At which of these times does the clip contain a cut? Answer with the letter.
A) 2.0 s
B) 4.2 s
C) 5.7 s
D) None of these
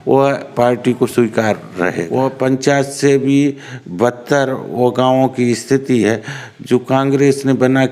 A